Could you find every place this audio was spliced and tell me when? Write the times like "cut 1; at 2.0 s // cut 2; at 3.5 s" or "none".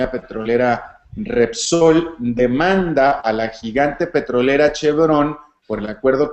cut 1; at 2.6 s